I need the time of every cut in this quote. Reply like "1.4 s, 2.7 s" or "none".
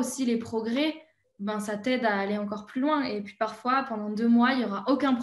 none